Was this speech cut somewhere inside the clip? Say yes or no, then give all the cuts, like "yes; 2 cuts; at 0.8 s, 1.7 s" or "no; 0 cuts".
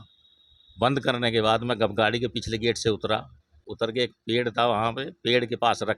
no; 0 cuts